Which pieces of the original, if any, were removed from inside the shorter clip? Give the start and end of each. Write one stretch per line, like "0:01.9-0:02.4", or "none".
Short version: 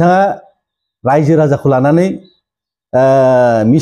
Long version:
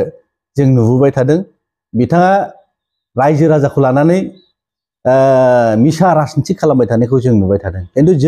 none